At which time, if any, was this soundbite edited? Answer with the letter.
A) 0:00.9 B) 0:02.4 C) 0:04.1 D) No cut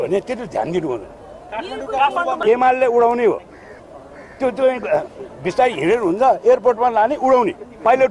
B